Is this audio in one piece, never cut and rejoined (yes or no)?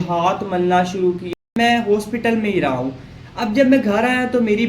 no